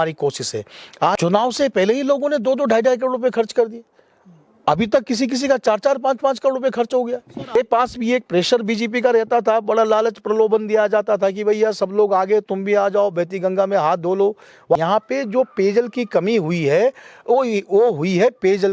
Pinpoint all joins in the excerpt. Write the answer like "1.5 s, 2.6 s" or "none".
1.2 s, 7.6 s, 14.8 s

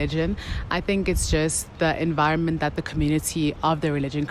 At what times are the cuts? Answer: none

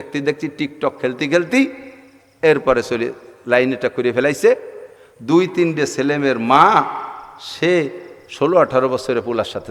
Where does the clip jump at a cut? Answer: none

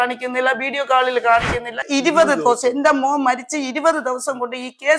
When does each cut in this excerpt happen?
1.8 s

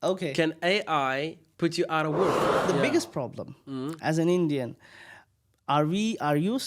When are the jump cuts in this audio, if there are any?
2.7 s

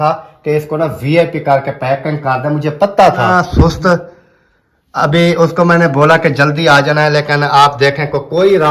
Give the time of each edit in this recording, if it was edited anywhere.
3.4 s

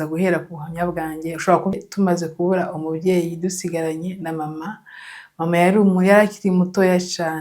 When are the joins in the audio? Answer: 1.8 s

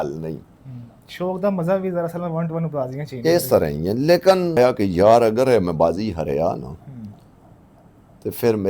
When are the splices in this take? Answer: 4.6 s

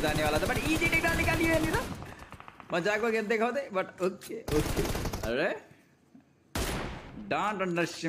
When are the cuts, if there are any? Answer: 5.2 s

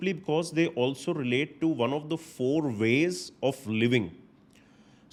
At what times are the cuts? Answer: none

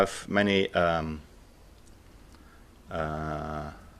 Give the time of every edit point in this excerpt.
1.9 s

